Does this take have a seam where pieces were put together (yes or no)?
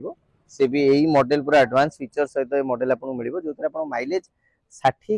no